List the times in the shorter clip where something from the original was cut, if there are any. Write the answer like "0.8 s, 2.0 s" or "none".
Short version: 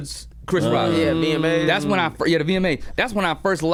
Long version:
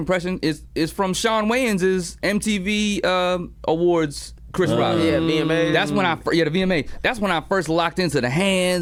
none

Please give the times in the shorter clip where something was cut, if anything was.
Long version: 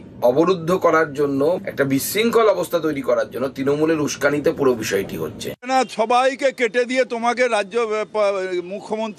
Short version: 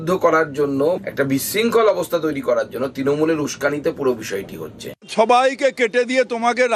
5.1 s

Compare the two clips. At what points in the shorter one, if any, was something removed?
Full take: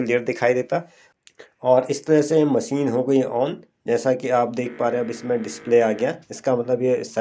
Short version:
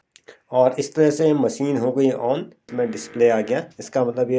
2.6 s

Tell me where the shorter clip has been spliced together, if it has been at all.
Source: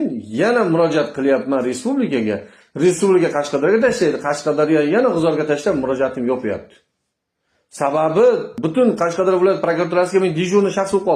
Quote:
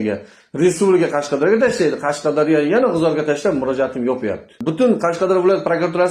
4.6 s

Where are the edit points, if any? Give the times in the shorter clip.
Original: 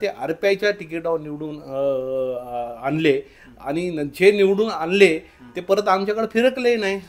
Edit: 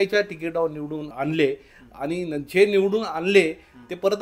1.1 s

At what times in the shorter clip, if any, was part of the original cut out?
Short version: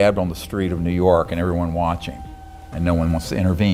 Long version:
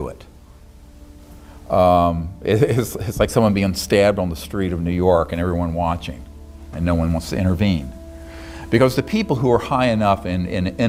none

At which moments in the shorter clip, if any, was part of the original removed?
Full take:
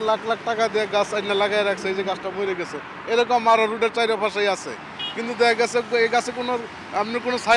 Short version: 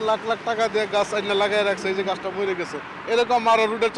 none

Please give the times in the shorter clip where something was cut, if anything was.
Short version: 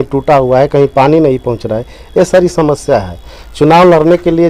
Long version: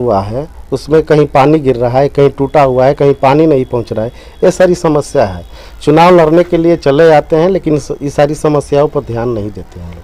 none

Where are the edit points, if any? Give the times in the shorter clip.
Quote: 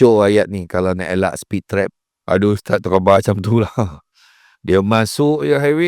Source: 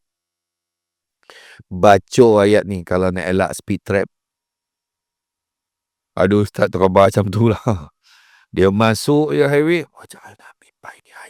2.1 s

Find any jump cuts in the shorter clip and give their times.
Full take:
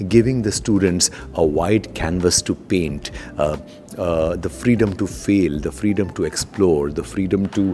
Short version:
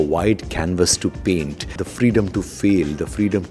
1.8 s

